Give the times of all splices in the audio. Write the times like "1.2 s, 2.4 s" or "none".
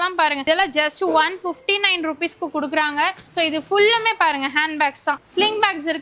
none